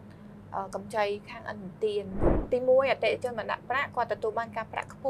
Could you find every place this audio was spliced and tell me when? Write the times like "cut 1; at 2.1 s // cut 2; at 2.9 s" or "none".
cut 1; at 2.4 s